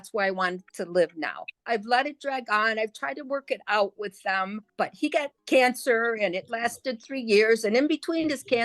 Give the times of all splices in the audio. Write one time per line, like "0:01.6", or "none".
0:01.6
0:05.1